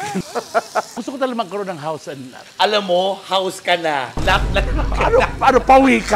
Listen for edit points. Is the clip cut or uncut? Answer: cut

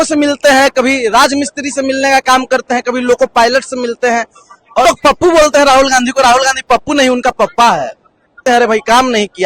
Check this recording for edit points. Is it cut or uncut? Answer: cut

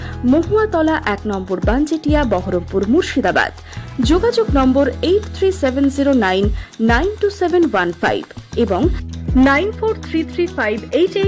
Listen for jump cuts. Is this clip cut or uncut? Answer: uncut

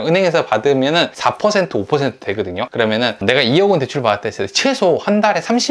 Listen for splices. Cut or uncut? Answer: cut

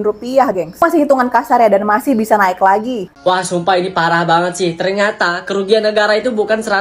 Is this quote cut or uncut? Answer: cut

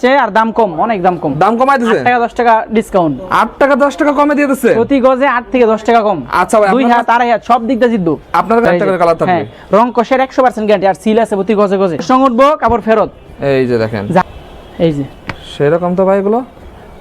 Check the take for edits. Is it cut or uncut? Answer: cut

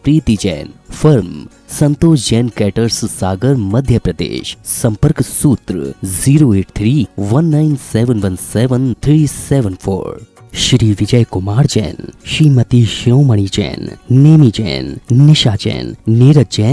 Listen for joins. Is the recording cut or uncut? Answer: uncut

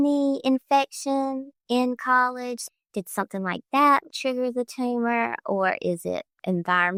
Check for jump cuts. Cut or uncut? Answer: uncut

